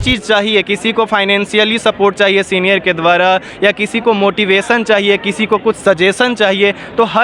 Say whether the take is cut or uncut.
uncut